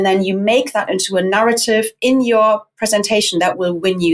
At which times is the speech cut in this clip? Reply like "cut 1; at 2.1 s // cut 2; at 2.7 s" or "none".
none